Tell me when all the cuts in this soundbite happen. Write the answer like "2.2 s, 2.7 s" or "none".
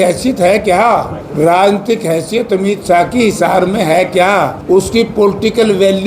1.2 s, 4.6 s